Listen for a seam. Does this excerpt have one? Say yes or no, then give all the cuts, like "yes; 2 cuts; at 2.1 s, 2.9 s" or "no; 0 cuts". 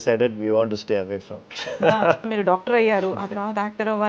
yes; 1 cut; at 2.3 s